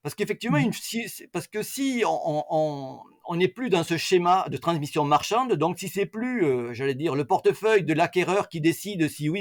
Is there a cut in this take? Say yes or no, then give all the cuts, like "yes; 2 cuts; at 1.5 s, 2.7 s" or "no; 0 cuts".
no; 0 cuts